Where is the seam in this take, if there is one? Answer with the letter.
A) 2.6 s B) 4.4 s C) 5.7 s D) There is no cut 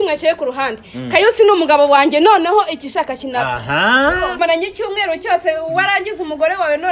B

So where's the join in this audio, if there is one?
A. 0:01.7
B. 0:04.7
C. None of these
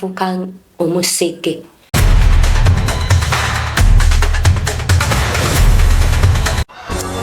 A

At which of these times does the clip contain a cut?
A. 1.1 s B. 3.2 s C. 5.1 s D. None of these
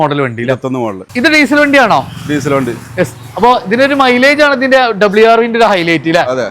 A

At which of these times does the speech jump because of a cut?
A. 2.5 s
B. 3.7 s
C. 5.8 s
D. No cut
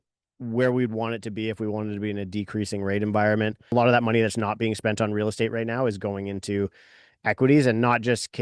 B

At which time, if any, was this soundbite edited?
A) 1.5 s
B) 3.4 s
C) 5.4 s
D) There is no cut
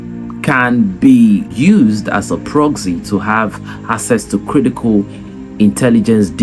A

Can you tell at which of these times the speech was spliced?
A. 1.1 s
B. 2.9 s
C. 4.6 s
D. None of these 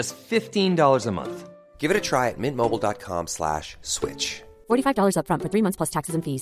D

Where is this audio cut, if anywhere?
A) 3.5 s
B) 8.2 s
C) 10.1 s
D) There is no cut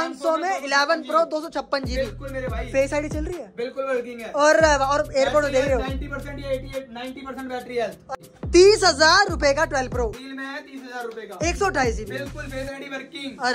B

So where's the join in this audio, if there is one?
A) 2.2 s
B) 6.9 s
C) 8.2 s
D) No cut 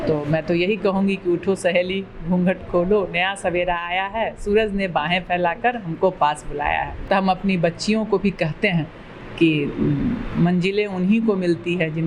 B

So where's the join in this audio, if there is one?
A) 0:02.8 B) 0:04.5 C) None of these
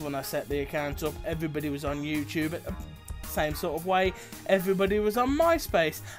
A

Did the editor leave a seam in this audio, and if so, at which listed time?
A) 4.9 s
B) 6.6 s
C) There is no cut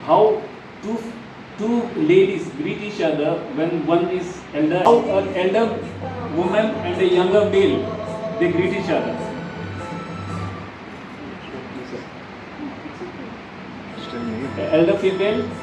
A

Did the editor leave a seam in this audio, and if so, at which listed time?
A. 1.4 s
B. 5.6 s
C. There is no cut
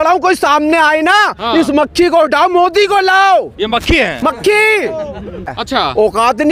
B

